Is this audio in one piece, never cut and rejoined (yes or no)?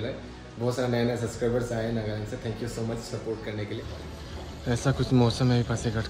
no